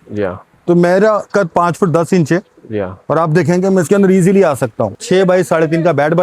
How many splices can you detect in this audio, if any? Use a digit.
1